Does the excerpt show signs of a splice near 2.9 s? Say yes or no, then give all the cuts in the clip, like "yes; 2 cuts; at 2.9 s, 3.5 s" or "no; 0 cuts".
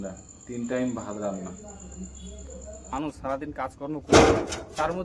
yes; 1 cut; at 2.9 s